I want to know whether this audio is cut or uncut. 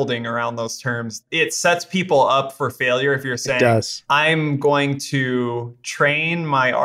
cut